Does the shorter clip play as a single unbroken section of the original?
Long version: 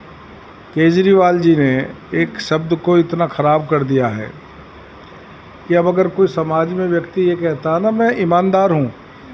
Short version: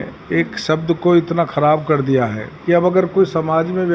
no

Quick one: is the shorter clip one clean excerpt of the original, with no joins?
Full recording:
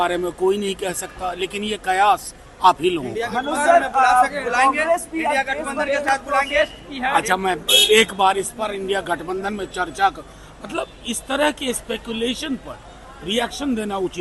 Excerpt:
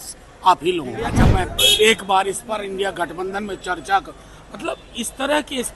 no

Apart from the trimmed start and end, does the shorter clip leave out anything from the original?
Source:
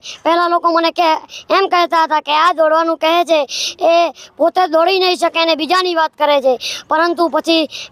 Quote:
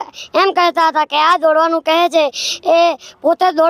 no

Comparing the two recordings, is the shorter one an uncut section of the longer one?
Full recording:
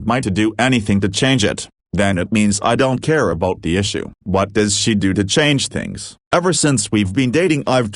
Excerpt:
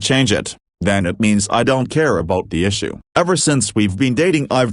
no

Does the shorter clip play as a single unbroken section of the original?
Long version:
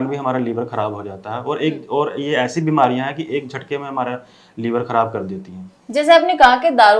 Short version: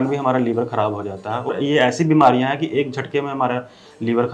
no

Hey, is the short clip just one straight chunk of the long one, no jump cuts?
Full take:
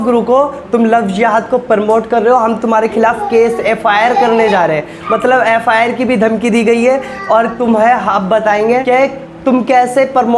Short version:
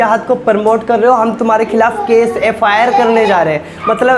yes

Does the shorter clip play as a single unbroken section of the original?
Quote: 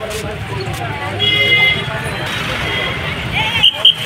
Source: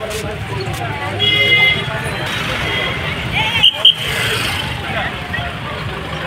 yes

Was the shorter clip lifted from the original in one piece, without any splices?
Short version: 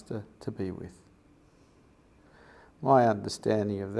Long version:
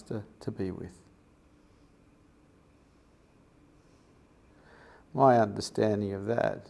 no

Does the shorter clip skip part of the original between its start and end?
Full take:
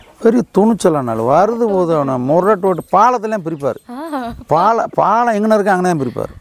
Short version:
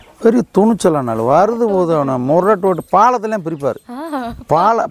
no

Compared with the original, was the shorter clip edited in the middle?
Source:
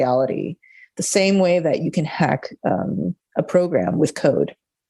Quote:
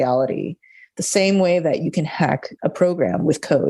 yes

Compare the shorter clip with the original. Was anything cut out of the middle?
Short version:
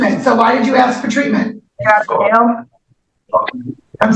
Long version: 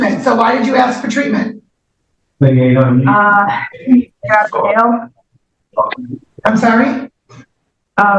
yes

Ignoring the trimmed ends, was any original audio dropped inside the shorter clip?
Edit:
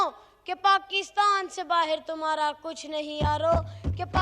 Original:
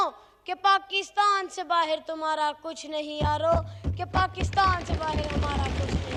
no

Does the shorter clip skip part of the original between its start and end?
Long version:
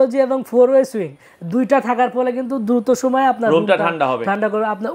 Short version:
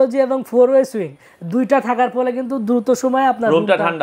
no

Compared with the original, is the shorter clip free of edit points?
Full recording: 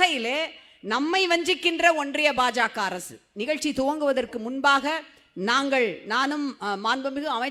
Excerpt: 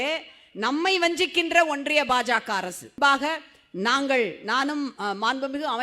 no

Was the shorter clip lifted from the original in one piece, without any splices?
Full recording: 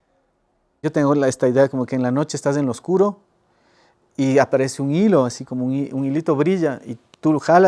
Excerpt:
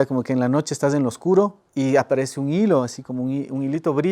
no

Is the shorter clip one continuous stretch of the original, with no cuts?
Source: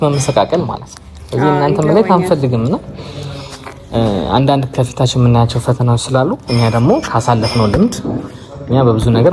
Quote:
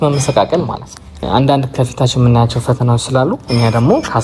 no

